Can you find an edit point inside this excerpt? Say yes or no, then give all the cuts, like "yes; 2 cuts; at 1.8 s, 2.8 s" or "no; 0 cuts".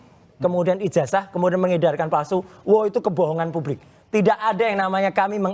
no; 0 cuts